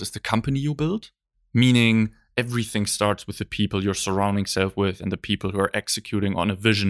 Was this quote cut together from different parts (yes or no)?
no